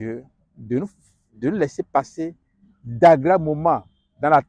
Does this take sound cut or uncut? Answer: uncut